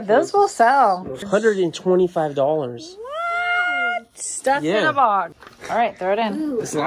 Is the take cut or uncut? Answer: cut